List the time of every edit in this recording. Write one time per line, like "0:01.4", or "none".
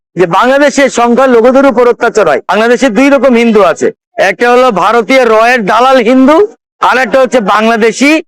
0:02.5

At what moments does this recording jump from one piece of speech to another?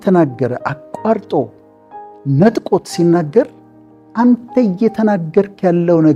none

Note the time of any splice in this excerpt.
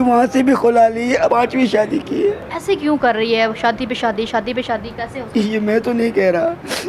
0:01.3
0:02.5
0:05.2

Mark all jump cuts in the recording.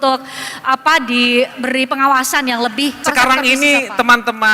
0:03.0

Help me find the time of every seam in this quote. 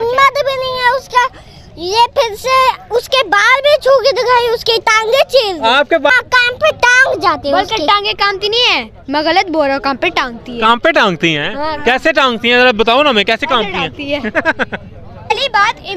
0:06.1
0:15.3

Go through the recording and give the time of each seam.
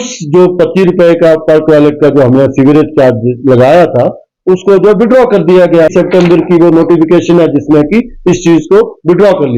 0:05.9

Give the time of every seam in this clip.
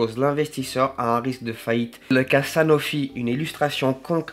0:02.1

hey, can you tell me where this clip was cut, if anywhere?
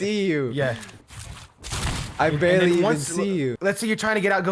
0:03.6

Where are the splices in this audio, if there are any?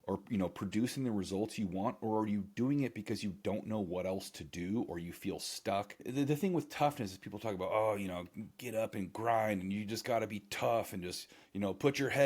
0:06.1

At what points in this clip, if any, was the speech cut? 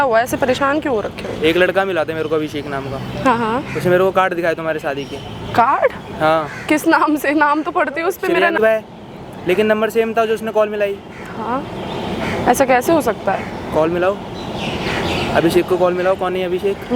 none

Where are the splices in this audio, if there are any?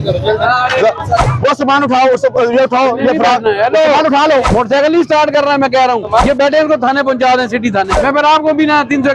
0:01.2
0:04.5
0:06.2
0:08.0

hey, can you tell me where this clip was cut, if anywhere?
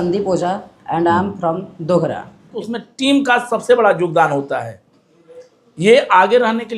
0:02.5

